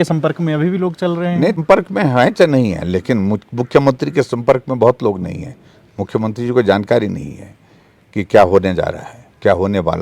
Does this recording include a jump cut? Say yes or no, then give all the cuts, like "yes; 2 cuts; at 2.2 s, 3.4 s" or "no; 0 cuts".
yes; 1 cut; at 1.6 s